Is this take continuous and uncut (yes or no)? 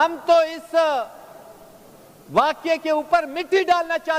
yes